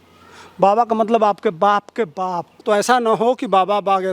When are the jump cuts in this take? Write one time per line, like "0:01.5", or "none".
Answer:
0:02.5